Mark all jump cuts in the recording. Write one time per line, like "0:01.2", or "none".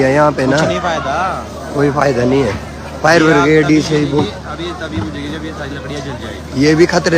none